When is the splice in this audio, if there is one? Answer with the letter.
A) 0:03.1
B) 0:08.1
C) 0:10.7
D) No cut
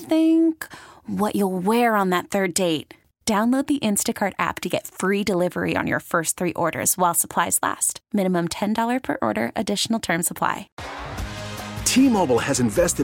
C